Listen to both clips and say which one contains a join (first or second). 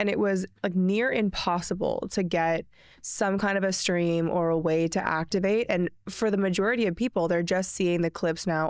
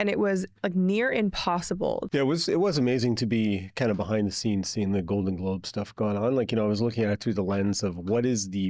second